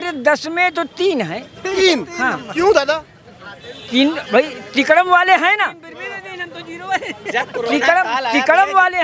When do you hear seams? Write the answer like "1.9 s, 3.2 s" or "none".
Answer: none